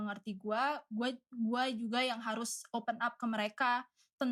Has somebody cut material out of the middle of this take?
no; 0 cuts

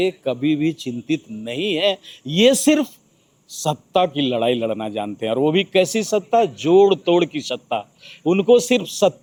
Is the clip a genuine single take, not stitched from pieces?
yes; 0 cuts

